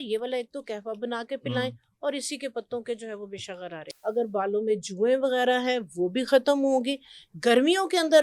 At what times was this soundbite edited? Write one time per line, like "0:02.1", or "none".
0:03.8